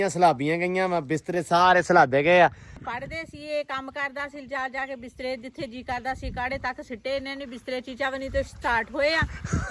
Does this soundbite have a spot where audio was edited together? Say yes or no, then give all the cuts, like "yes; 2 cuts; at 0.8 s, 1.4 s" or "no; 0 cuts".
yes; 1 cut; at 2.7 s